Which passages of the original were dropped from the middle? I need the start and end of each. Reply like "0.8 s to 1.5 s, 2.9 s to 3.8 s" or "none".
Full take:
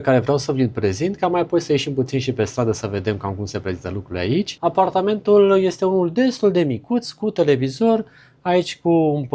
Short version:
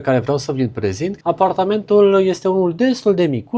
1.2 s to 4.5 s